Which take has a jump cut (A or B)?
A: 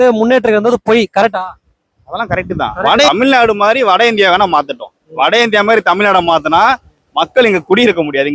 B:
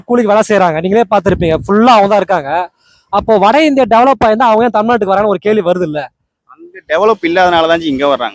A